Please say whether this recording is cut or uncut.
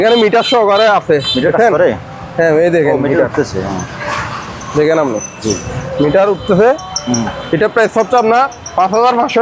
uncut